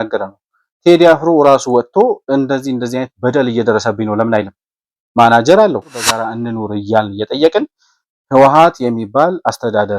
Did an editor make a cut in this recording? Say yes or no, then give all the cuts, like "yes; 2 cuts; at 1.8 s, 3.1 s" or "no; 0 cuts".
yes; 1 cut; at 6.2 s